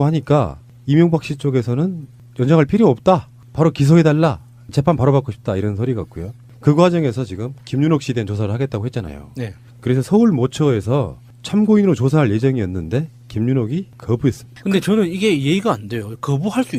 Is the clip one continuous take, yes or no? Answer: yes